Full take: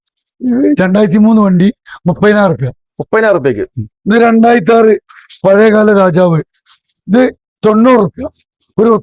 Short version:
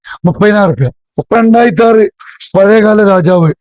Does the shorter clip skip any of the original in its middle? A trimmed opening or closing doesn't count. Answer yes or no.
yes